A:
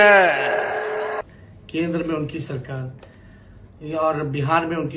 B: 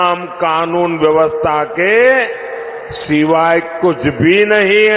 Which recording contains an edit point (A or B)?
A